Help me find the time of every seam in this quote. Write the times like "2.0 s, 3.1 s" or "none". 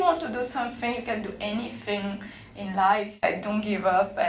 3.2 s